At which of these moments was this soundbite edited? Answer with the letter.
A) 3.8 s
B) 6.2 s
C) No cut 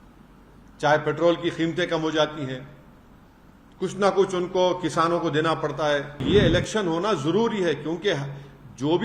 B